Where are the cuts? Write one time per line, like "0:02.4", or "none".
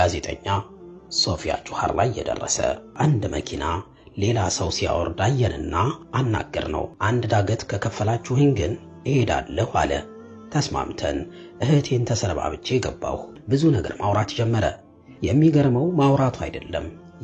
0:02.9
0:06.9
0:13.3